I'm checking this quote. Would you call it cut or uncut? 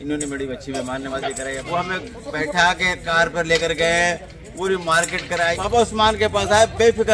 cut